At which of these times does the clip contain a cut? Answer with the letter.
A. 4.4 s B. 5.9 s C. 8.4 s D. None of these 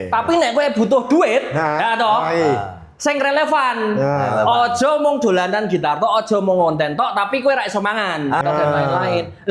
C